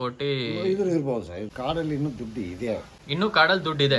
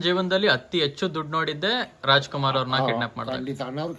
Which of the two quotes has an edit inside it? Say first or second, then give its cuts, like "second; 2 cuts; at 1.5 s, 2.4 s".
first; 2 cuts; at 1.5 s, 3.0 s